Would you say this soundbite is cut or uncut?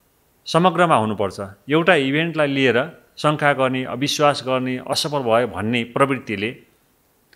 uncut